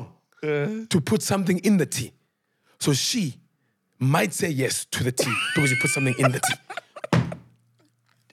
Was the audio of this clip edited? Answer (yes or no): no